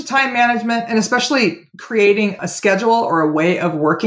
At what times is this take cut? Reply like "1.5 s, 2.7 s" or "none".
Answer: 2.4 s